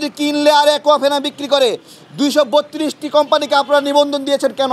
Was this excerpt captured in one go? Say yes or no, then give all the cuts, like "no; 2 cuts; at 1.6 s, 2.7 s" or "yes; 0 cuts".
yes; 0 cuts